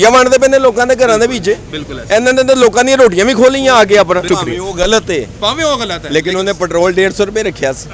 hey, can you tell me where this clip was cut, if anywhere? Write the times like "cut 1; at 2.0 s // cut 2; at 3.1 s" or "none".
cut 1; at 4.3 s